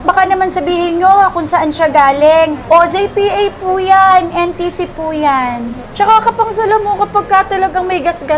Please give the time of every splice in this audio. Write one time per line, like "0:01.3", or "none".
0:02.6
0:05.9